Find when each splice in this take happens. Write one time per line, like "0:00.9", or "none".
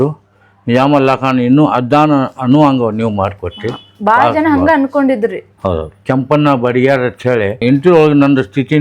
0:05.9
0:07.6

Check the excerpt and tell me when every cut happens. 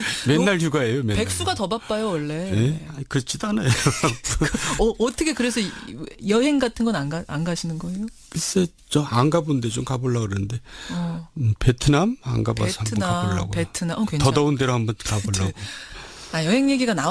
0:07.3

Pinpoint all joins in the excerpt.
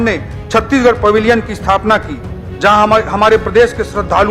none

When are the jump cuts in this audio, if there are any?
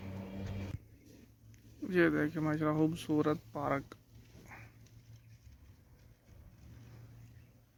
none

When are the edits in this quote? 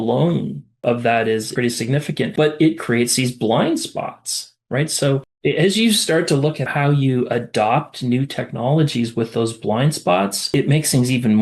0:05.3

